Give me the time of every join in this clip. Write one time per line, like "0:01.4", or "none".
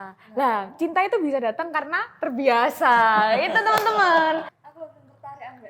0:04.5